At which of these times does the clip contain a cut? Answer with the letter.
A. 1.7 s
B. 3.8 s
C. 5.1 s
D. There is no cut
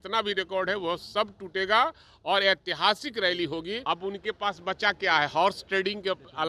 B